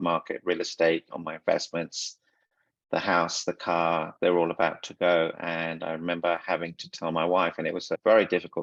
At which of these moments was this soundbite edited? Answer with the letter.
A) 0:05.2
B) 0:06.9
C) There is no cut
C